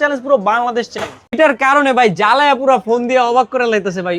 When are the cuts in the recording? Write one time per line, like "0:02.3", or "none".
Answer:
0:01.3